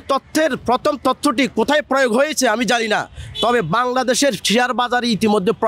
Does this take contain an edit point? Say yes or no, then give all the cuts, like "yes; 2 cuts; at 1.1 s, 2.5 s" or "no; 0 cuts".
no; 0 cuts